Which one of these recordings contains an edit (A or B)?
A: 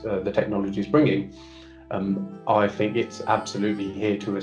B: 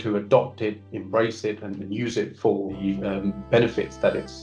B